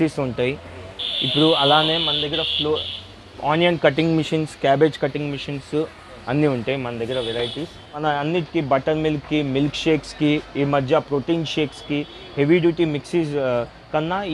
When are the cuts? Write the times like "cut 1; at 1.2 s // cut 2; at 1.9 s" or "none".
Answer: cut 1; at 8.0 s